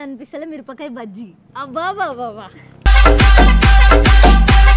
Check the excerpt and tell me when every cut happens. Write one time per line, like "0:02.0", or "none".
none